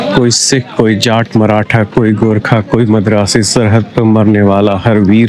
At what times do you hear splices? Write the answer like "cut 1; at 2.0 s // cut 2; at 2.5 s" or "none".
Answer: none